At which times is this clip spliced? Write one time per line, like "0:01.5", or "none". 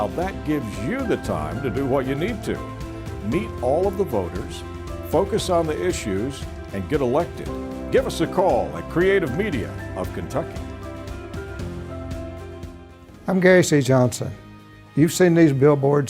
0:13.2